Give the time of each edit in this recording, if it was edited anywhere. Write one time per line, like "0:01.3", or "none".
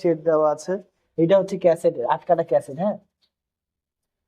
0:01.1